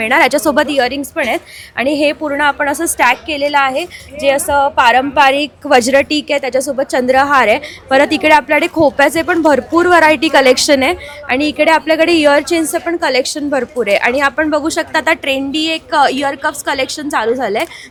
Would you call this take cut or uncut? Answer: uncut